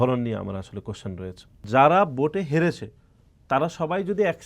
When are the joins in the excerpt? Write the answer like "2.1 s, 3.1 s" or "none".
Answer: 1.6 s